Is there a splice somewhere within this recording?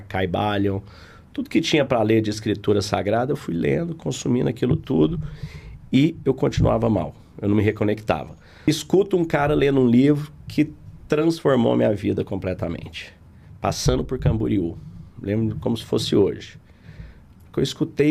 yes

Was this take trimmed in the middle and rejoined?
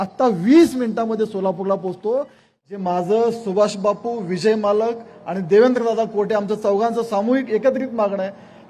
yes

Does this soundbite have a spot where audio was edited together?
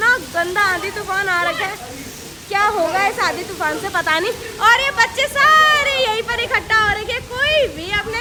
no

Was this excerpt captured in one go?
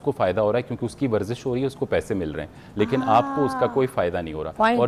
yes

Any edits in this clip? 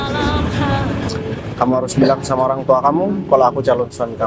no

